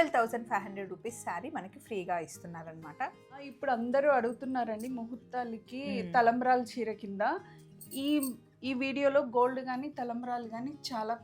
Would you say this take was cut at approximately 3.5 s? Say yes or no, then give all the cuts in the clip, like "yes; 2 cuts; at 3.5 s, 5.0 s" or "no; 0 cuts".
yes; 1 cut; at 3.5 s